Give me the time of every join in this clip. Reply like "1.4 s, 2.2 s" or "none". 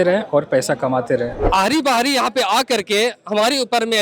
1.4 s